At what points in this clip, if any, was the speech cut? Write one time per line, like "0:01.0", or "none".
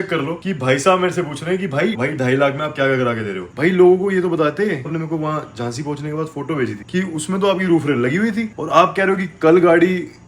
0:02.0
0:03.5
0:04.9
0:06.8